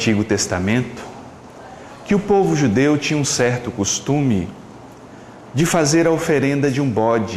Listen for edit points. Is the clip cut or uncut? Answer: cut